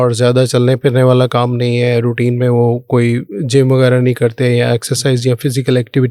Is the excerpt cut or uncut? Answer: uncut